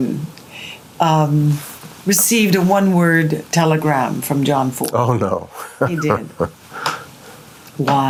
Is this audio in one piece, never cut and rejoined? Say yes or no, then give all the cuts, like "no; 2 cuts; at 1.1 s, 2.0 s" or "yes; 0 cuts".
yes; 0 cuts